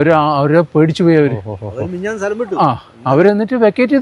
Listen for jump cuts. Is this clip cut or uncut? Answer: uncut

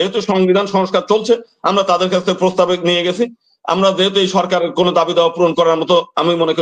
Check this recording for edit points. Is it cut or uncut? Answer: uncut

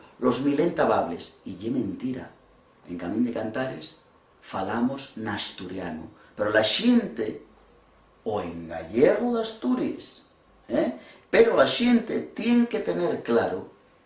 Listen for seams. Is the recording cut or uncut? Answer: uncut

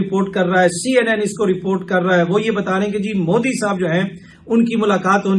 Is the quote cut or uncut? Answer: uncut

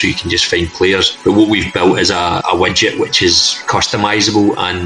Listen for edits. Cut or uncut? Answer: cut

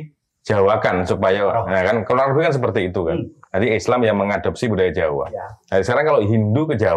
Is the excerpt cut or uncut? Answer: uncut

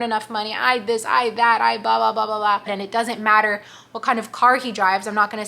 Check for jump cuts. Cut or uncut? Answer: cut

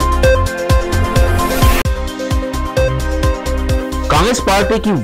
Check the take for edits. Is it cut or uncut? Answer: cut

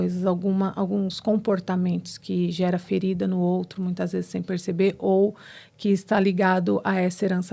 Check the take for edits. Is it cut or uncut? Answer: uncut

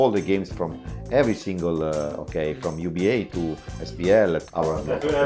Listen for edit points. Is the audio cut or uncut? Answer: uncut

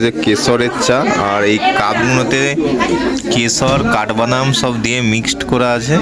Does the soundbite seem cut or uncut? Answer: uncut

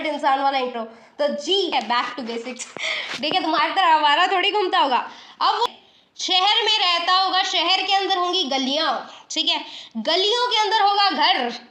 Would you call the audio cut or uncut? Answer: cut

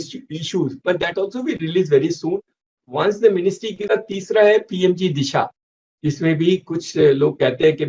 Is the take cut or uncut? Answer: cut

